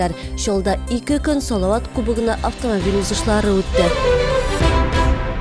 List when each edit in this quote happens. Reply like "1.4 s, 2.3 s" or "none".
3.8 s